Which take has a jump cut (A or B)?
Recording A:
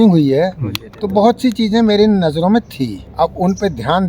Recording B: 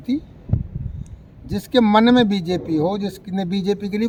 A